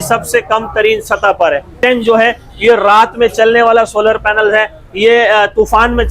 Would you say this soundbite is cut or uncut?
cut